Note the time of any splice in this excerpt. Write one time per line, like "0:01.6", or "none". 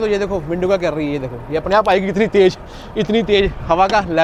none